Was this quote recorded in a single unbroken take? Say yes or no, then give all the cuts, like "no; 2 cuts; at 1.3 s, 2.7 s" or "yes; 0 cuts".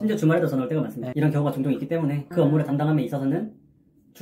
no; 2 cuts; at 1.0 s, 2.2 s